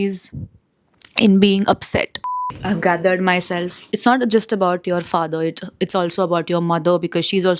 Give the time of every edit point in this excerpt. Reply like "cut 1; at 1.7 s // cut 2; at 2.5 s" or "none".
none